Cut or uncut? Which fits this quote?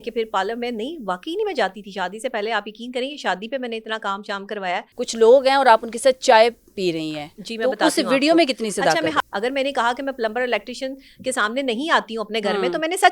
cut